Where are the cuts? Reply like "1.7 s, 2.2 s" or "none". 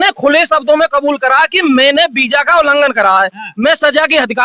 none

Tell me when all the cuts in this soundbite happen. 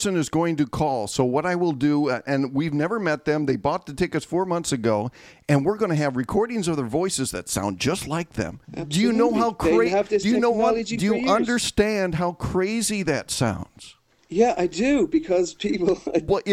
8.7 s

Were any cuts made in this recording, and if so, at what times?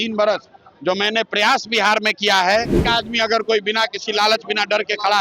2.8 s

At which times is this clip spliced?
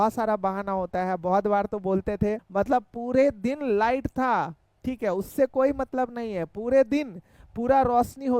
2.4 s

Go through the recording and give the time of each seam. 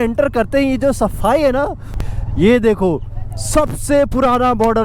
2.0 s

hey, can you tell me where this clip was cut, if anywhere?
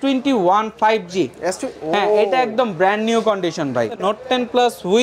4.0 s

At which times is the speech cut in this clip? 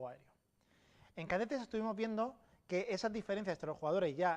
3.0 s

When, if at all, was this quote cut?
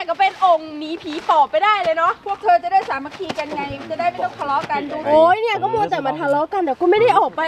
5.0 s

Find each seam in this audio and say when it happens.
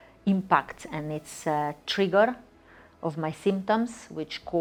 none

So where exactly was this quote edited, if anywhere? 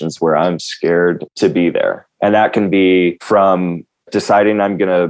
2.1 s, 3.2 s

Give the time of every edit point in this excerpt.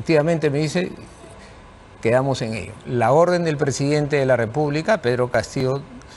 2.8 s

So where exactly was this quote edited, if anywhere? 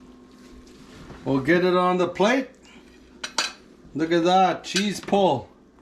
none

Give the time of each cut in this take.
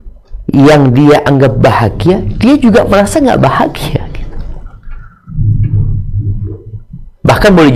none

